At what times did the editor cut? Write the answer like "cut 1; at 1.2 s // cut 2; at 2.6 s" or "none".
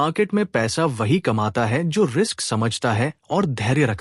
none